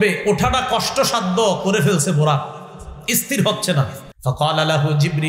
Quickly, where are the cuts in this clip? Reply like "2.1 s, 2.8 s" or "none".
4.0 s